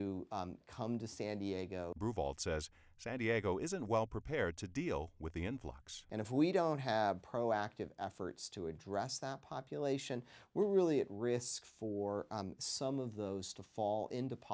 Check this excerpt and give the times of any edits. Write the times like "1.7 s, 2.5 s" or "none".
none